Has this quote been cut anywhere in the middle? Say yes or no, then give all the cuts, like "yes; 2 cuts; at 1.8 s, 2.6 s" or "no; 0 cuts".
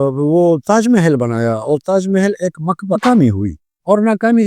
yes; 1 cut; at 3.0 s